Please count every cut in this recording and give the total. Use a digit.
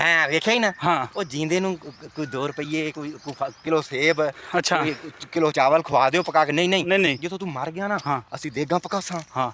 0